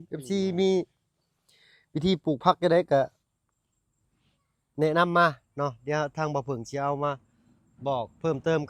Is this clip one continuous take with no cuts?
yes; 0 cuts

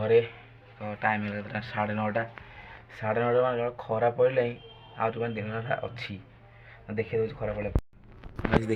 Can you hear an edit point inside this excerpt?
no; 0 cuts

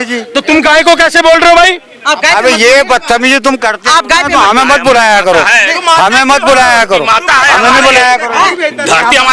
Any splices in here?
no; 0 cuts

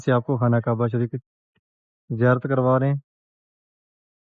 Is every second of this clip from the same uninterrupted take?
yes; 0 cuts

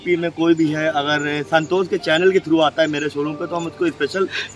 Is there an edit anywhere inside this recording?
no; 0 cuts

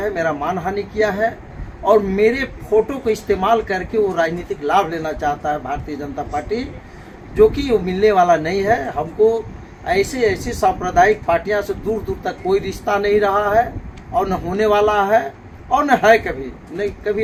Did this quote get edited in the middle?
no; 0 cuts

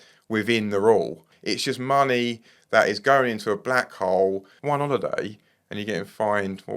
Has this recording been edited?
yes; 2 cuts; at 1.3 s, 4.5 s

